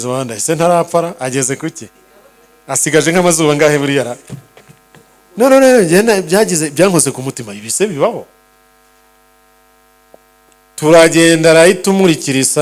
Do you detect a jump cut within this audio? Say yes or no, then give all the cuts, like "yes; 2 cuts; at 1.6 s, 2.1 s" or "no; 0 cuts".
no; 0 cuts